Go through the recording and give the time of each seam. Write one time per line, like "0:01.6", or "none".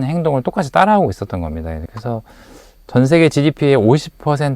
0:01.8